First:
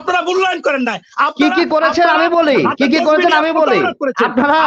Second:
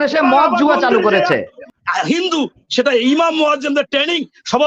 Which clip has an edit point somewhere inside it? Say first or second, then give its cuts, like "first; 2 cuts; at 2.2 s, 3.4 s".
second; 1 cut; at 1.6 s